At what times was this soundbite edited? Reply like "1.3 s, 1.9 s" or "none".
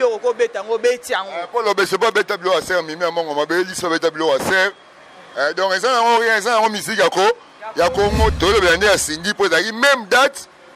8.3 s